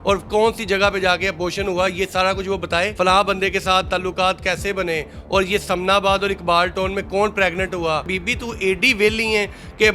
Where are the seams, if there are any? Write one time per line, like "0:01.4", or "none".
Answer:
0:02.9
0:08.1